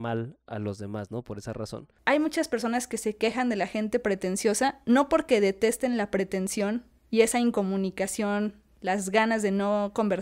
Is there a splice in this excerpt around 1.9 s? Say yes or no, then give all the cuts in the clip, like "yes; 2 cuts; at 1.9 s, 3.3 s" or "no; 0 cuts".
yes; 1 cut; at 1.9 s